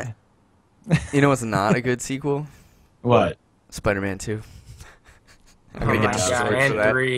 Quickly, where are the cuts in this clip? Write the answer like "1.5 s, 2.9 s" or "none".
4.8 s

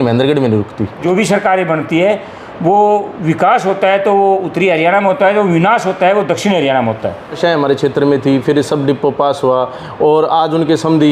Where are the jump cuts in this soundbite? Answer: 1.0 s, 7.4 s

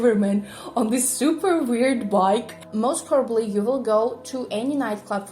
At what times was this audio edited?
2.6 s

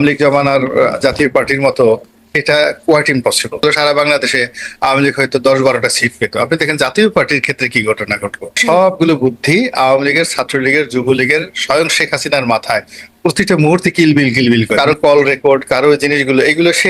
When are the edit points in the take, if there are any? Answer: 3.6 s, 8.6 s, 14.7 s

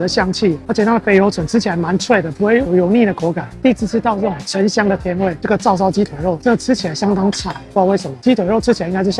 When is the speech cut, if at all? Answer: 5.4 s

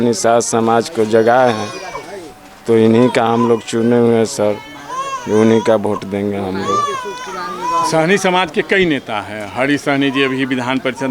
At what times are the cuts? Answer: none

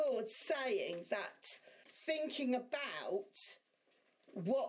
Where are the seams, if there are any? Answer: 1.9 s

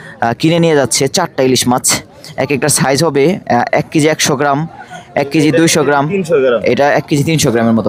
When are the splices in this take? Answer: none

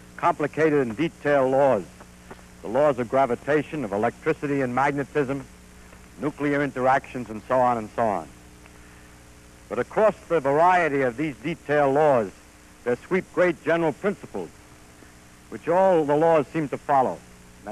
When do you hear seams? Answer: 15.7 s

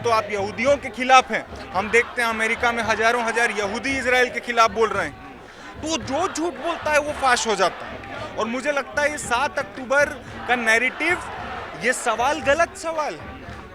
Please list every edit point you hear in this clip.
none

